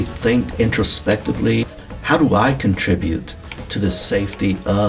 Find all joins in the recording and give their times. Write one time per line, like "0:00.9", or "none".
0:01.7